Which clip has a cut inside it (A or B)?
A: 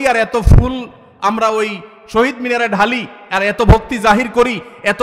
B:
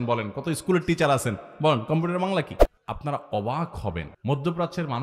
B